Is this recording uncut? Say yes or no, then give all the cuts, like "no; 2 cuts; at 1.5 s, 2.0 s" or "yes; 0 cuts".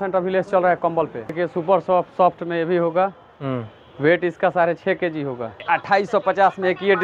no; 2 cuts; at 1.4 s, 5.6 s